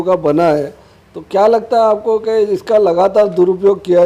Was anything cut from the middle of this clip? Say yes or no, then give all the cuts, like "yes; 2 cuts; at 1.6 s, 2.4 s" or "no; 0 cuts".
no; 0 cuts